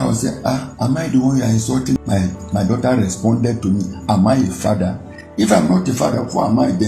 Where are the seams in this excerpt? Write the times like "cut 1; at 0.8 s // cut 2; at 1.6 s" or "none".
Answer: cut 1; at 2.0 s